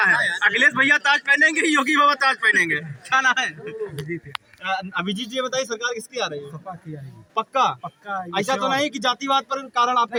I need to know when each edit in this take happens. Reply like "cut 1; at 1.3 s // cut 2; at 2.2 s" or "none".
none